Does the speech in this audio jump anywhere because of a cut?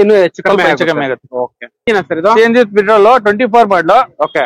yes; 1 cut; at 1.9 s

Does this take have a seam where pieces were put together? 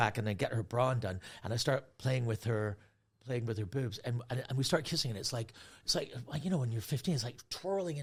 no; 0 cuts

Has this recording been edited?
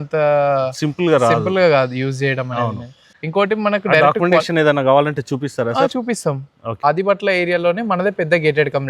yes; 2 cuts; at 3.1 s, 6.7 s

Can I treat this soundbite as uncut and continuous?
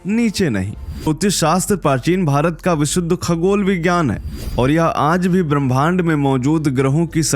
no; 1 cut; at 1.1 s

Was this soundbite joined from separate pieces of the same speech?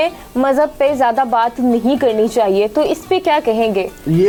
no; 0 cuts

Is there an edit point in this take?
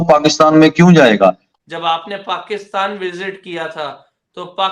yes; 1 cut; at 1.5 s

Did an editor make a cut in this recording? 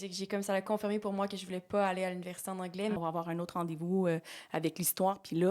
yes; 1 cut; at 3.0 s

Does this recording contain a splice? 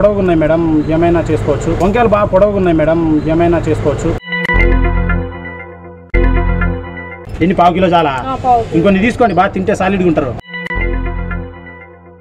yes; 3 cuts; at 1.8 s, 4.1 s, 7.1 s

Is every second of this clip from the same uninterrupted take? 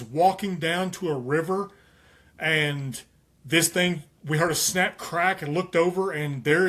yes; 0 cuts

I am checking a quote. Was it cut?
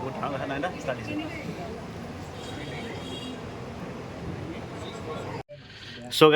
yes; 1 cut; at 5.4 s

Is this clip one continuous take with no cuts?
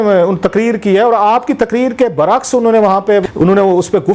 no; 1 cut; at 3.2 s

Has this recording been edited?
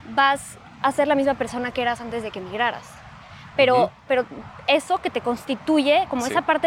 no; 0 cuts

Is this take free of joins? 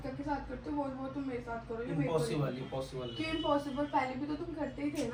yes; 0 cuts

